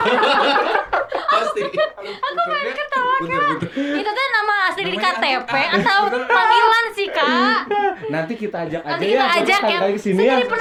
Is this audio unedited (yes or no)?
yes